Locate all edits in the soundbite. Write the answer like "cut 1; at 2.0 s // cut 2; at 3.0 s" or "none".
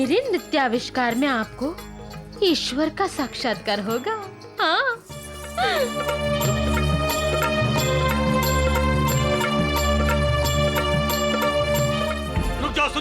none